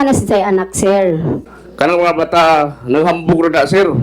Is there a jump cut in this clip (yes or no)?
yes